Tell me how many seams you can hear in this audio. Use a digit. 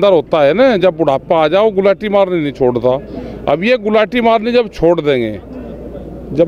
0